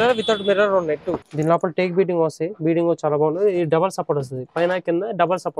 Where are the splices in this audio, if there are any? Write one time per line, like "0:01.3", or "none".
0:01.3